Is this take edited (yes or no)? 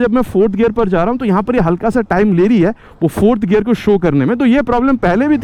no